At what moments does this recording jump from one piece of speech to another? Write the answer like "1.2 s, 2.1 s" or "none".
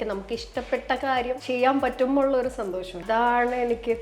1.4 s, 3.0 s